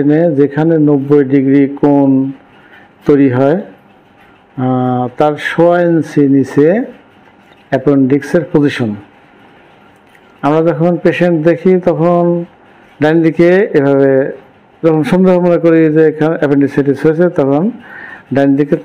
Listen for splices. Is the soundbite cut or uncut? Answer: uncut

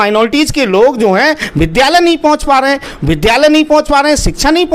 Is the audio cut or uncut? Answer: uncut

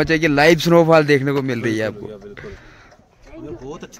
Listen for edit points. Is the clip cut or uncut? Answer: uncut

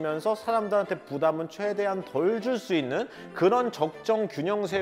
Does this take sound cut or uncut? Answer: uncut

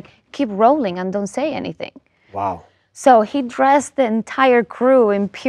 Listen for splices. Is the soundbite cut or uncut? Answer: uncut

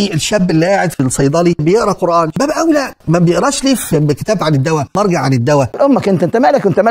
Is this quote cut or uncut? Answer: uncut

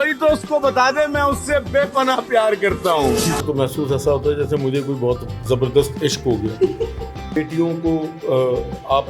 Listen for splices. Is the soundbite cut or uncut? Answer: cut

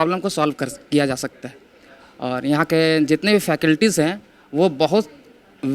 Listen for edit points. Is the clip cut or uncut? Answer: uncut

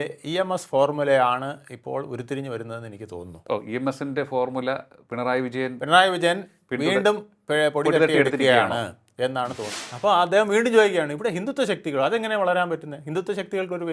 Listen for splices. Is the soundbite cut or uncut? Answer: cut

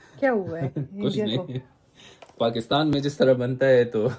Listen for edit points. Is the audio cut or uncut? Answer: uncut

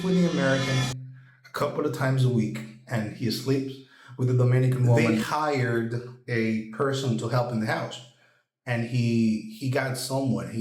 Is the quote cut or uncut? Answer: cut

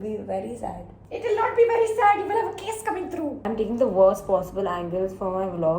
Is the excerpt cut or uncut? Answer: cut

